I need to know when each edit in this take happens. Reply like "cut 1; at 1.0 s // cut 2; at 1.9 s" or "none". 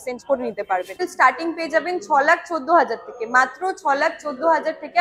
cut 1; at 1.0 s